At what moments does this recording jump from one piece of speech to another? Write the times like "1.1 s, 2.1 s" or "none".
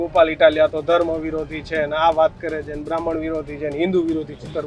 none